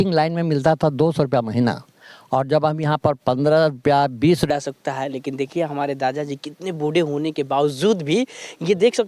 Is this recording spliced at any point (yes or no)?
yes